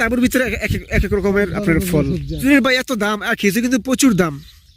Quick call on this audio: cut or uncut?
cut